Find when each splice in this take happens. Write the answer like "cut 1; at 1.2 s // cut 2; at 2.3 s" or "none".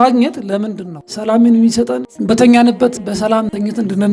cut 1; at 1.1 s